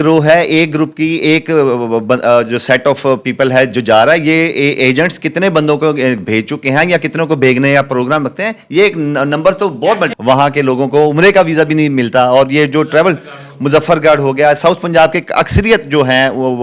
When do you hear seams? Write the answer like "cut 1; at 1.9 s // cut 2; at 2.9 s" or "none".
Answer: cut 1; at 10.1 s